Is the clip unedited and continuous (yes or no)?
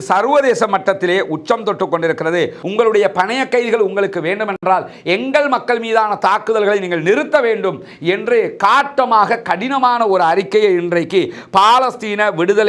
no